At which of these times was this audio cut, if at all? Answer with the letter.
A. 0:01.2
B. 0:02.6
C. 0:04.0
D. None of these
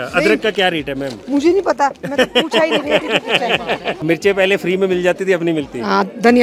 C